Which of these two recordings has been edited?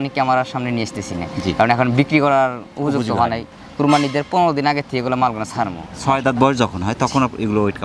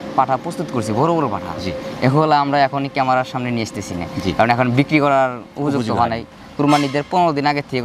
first; 1 cut; at 6.0 s

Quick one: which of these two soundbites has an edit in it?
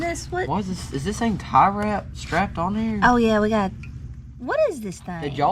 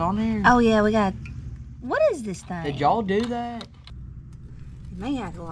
second; 1 cut; at 3.9 s

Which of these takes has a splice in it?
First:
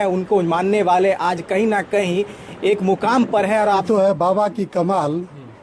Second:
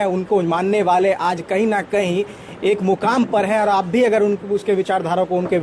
first; 1 cut; at 3.8 s

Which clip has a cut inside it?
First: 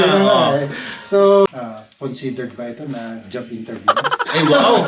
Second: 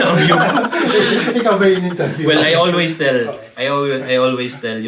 first; 1 cut; at 1.5 s

